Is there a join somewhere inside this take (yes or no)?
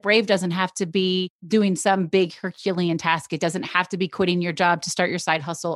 yes